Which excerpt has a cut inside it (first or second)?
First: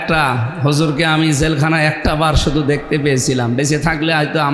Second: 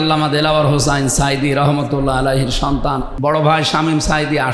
second